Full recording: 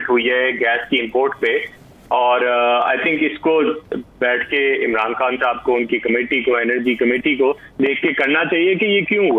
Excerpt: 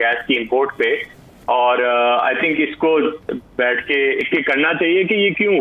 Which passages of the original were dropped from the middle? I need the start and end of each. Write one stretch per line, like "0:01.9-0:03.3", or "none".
0:04.9-0:08.0